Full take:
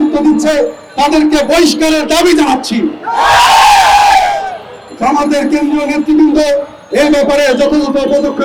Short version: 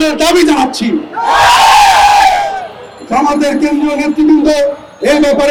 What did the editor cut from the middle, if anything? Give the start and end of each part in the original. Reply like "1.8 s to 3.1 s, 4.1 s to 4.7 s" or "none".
none